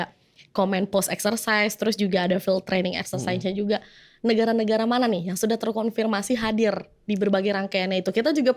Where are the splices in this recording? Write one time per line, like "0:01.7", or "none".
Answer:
none